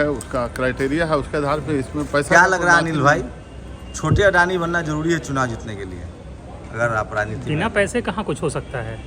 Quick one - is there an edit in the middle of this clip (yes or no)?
no